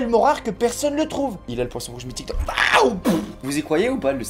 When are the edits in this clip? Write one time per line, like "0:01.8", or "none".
0:03.4